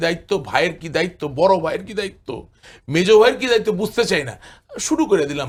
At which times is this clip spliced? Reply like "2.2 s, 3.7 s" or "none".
none